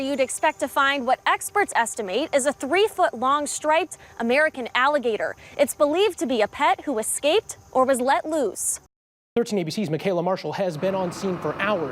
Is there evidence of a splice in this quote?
yes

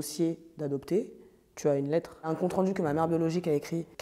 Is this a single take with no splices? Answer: no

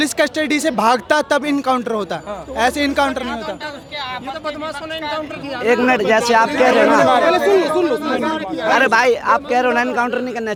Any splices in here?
no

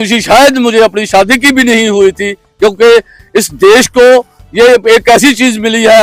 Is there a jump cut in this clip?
no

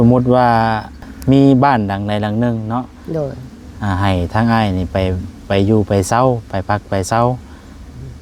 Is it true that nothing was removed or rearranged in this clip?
no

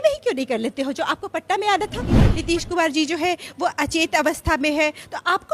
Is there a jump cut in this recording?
yes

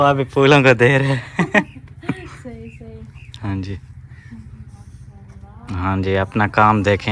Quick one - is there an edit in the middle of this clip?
no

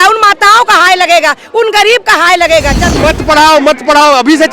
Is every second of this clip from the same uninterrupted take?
no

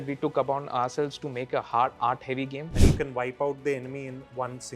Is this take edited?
yes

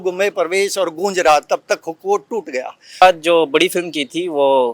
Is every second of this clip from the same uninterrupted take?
no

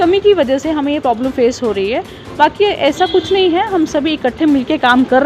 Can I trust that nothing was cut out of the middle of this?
yes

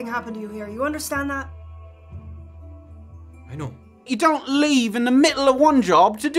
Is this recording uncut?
no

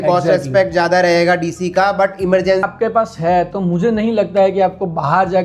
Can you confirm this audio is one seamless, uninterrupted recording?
no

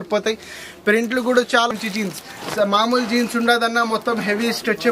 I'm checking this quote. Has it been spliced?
yes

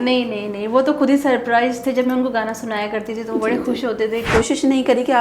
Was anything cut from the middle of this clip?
yes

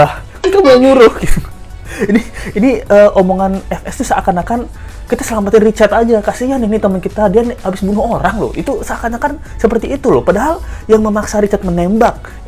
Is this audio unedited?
yes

